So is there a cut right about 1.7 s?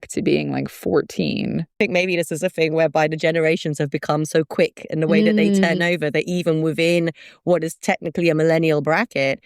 yes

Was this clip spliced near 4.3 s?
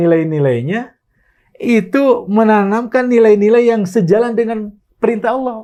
no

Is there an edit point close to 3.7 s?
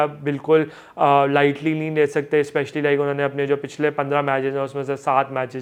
no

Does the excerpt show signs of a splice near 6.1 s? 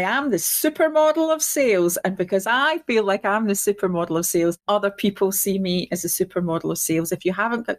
no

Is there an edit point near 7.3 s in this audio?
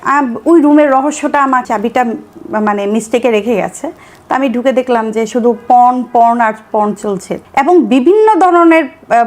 yes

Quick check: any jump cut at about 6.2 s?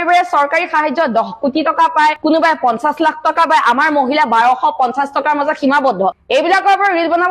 yes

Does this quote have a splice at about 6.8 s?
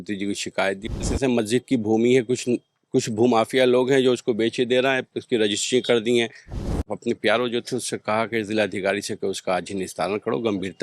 yes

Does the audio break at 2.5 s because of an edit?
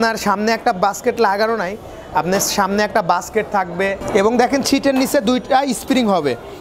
no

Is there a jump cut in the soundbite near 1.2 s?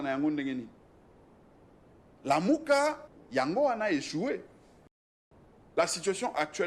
no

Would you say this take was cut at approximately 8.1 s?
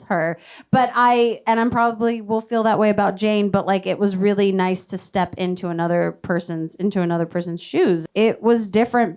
yes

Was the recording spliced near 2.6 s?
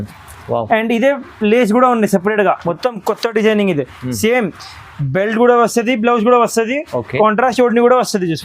yes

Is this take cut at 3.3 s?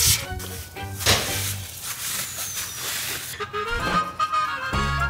yes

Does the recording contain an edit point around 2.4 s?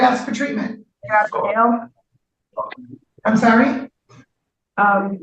no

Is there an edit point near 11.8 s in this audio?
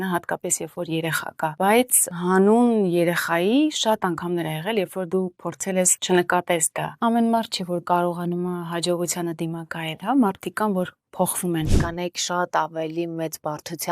yes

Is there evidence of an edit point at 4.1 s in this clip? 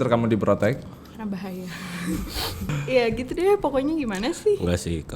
no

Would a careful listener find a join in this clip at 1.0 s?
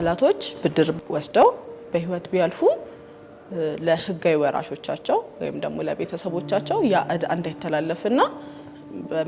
yes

